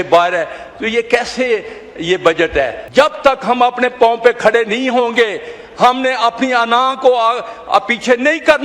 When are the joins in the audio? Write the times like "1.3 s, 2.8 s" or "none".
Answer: 2.8 s